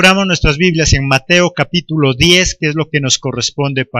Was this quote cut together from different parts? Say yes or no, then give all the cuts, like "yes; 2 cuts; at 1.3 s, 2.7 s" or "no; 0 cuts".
no; 0 cuts